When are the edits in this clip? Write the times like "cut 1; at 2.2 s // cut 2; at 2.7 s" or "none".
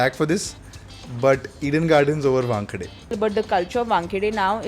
cut 1; at 3.1 s